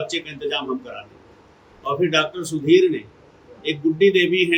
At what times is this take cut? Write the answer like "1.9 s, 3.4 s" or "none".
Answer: none